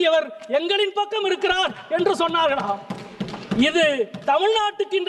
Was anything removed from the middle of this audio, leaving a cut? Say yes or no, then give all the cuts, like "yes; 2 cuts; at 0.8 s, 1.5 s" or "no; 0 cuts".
no; 0 cuts